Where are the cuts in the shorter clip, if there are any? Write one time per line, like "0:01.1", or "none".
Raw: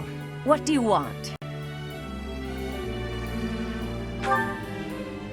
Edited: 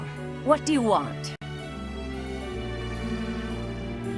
0:01.4